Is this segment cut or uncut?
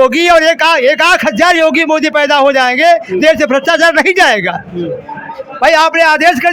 uncut